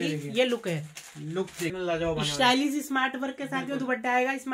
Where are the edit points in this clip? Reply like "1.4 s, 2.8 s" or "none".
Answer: 1.7 s